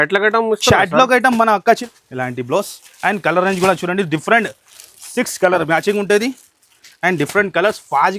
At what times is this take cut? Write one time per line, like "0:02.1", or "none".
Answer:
0:01.8